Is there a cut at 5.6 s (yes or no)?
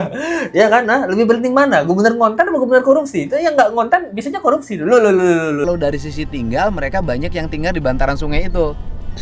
yes